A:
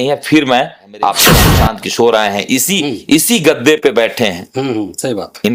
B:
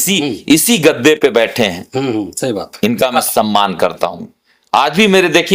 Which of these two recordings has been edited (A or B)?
A